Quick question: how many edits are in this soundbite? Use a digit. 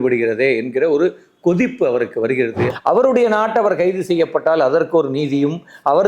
1